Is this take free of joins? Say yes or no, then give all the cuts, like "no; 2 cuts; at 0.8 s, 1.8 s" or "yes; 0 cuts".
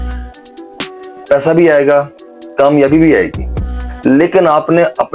yes; 0 cuts